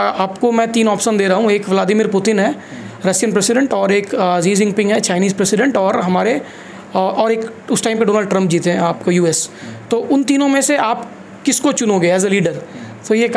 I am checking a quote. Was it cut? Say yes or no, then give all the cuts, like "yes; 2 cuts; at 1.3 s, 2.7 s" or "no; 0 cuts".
no; 0 cuts